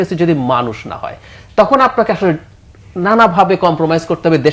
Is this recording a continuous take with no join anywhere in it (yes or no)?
yes